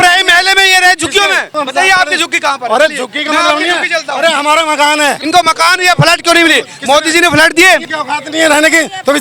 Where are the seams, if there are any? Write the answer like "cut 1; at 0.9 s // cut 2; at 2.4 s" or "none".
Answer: cut 1; at 1.5 s // cut 2; at 5.2 s // cut 3; at 7.9 s